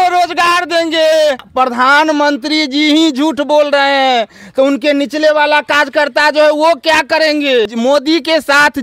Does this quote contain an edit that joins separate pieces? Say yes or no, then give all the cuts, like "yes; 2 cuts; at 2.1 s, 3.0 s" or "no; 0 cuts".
yes; 2 cuts; at 1.5 s, 7.7 s